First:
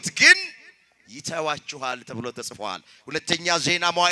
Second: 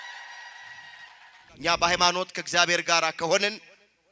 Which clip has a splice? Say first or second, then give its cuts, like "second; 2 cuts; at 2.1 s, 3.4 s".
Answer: second; 1 cut; at 1.4 s